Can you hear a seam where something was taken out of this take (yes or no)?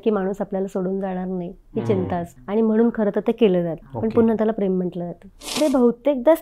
yes